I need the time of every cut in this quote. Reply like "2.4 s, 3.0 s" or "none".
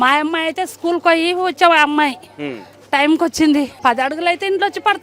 3.7 s